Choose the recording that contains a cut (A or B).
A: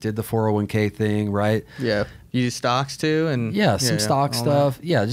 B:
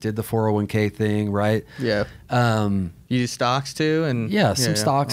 A